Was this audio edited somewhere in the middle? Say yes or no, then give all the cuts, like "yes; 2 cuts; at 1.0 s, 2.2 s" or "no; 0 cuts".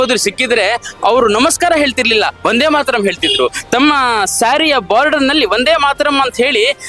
no; 0 cuts